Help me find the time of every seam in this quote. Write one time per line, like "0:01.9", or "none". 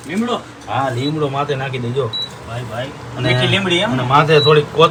none